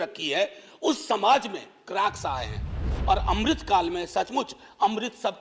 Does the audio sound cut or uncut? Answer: cut